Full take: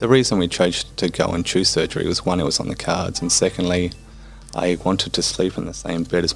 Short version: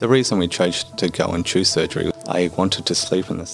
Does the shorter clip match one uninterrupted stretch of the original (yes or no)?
no